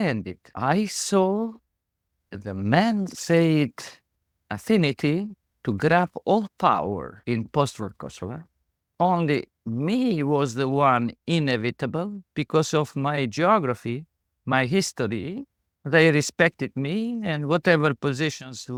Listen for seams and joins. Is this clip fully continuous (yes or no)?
yes